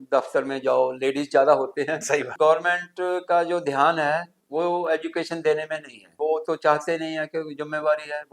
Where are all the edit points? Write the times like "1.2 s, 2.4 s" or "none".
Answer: 2.3 s, 6.1 s